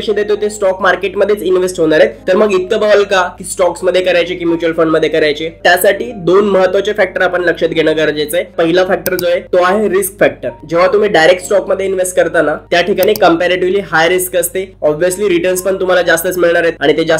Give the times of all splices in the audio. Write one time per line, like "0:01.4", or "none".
none